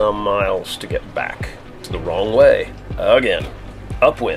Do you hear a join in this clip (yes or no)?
yes